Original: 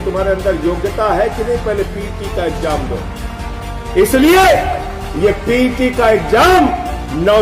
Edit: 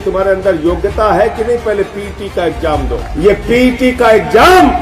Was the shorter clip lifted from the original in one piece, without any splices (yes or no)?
no